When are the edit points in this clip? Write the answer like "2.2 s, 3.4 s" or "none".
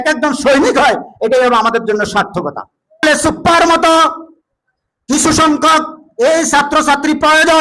3.0 s